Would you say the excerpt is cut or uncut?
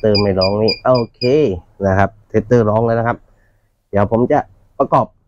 uncut